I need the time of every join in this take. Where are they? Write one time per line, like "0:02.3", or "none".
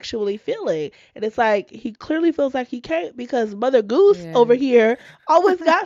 none